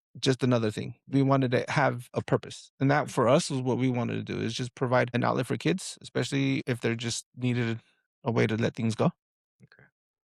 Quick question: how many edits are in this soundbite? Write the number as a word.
zero